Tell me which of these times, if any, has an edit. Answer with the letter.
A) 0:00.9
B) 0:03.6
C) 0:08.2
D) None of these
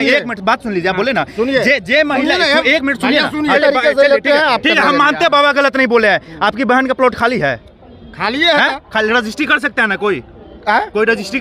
B